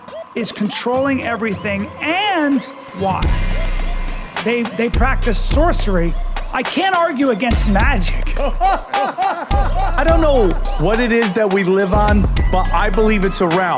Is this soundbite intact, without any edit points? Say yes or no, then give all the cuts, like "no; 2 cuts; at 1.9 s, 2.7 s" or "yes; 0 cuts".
yes; 0 cuts